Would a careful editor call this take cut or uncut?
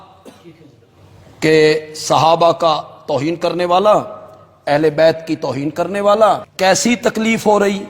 cut